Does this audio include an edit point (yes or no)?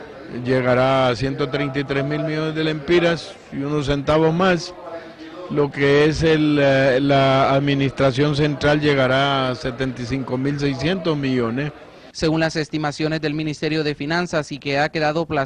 no